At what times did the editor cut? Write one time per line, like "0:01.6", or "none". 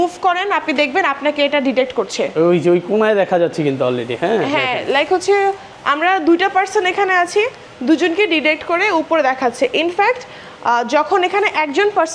none